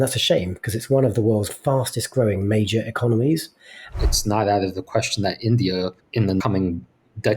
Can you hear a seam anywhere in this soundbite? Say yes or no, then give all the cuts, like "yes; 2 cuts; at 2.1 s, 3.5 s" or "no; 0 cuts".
yes; 3 cuts; at 1.5 s, 4.0 s, 6.3 s